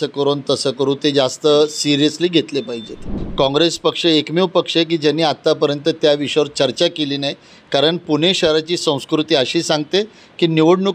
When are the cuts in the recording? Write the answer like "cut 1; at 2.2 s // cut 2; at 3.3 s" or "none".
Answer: cut 1; at 3.1 s